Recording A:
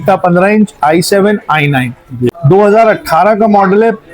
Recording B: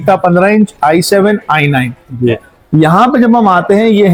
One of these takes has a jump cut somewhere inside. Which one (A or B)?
A